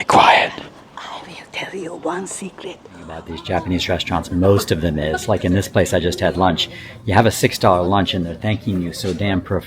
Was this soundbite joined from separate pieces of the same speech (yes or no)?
yes